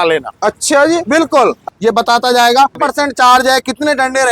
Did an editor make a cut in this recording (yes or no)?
yes